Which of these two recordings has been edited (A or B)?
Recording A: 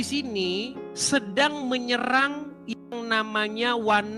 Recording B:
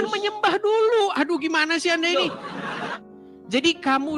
B